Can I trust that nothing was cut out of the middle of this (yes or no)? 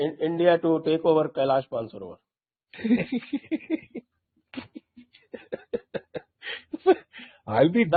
yes